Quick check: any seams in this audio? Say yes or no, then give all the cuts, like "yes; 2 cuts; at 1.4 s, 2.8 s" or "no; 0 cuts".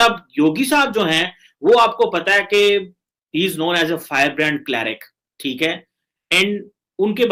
no; 0 cuts